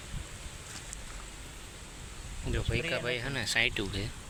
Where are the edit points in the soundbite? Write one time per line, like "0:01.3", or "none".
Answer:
none